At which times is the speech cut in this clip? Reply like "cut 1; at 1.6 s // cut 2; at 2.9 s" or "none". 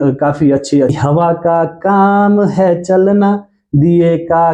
cut 1; at 0.9 s